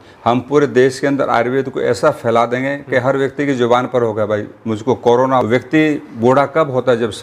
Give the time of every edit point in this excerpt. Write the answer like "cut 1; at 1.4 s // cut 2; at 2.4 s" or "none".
cut 1; at 5.4 s